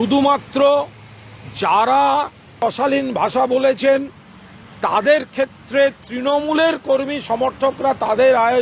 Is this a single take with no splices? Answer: no; 1 cut; at 2.4 s

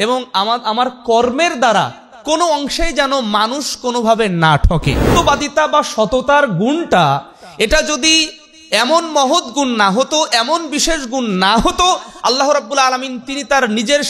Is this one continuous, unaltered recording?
no; 1 cut; at 5.0 s

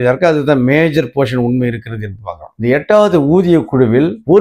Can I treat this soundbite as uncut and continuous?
no; 1 cut; at 2.5 s

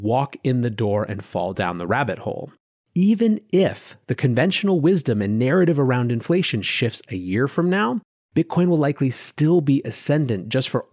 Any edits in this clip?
yes; 1 cut; at 2.7 s

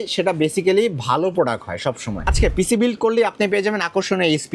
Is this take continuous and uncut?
no; 1 cut; at 2.3 s

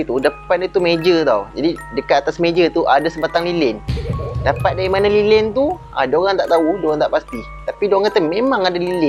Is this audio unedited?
yes; 0 cuts

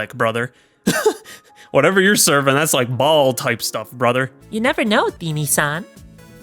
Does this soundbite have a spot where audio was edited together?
yes; 1 cut; at 4.4 s

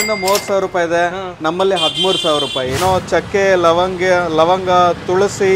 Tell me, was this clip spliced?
yes; 1 cut; at 2.8 s

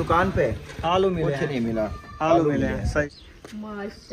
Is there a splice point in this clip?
yes; 1 cut; at 3.1 s

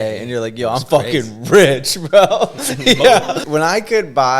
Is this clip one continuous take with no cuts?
no; 1 cut; at 3.4 s

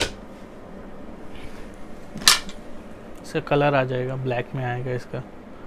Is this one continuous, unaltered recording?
yes; 0 cuts

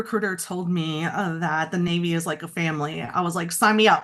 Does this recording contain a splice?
no; 0 cuts

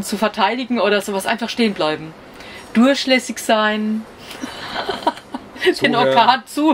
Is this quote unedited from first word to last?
yes; 0 cuts

